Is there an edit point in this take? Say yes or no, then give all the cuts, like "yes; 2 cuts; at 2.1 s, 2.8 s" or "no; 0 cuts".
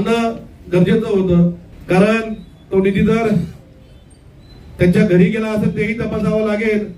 yes; 1 cut; at 1.7 s